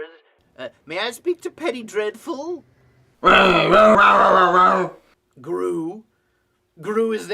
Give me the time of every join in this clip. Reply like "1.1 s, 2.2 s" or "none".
3.9 s

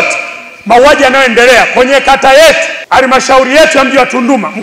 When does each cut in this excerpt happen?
2.7 s

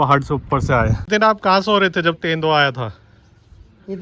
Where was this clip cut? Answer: 1.0 s

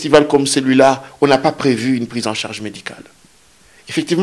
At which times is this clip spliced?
none

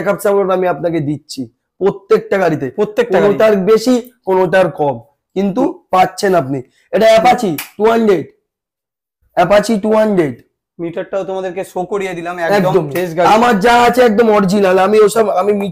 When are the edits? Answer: none

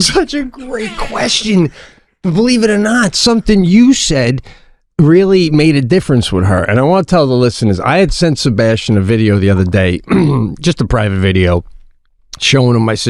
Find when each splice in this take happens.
none

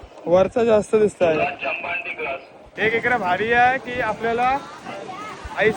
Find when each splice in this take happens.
2.6 s

